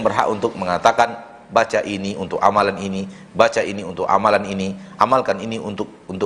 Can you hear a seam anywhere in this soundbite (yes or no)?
no